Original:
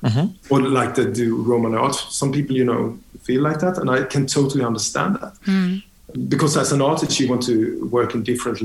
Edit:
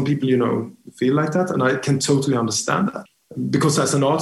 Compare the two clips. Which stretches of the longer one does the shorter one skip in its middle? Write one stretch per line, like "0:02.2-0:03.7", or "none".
0:05.3-0:05.9